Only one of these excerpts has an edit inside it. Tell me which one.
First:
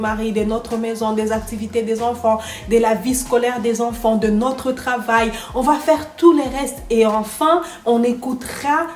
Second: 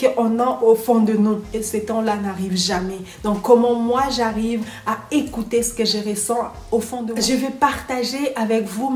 second; 1 cut; at 7.1 s

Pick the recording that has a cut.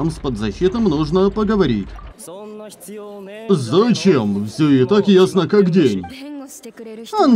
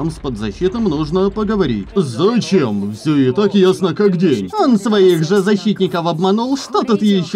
second; 2 cuts; at 1.9 s, 4.5 s

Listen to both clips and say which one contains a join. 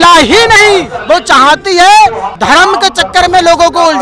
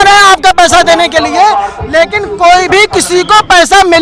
first; 2 cuts; at 0.9 s, 2.3 s

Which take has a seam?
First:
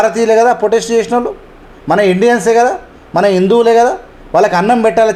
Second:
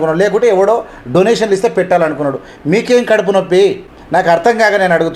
second; 1 cut; at 3.9 s

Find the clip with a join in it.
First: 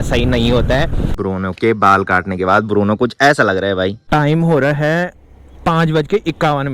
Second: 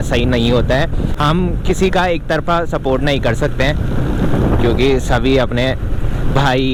first; 2 cuts; at 1.1 s, 4.0 s

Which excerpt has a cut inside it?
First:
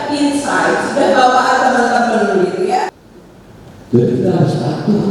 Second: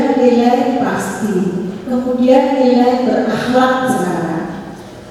first; 1 cut; at 2.9 s

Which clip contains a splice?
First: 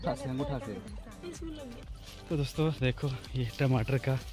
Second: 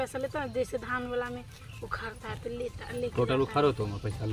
first; 1 cut; at 2.0 s

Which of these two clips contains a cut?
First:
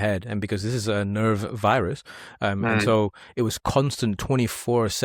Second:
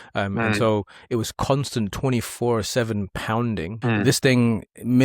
second; 1 cut; at 3.7 s

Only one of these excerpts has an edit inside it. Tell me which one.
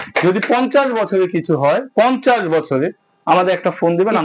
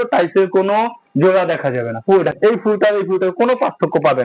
second; 1 cut; at 2.4 s

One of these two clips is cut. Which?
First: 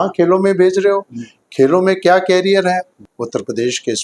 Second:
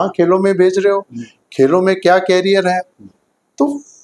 first; 1 cut; at 3.0 s

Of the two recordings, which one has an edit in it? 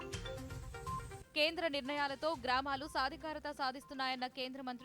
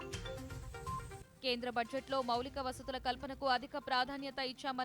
second; 1 cut; at 1.3 s

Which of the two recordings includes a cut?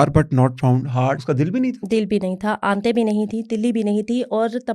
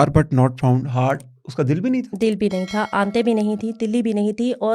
first; 1 cut; at 1.2 s

